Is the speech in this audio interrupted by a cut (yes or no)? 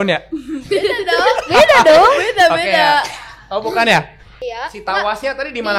yes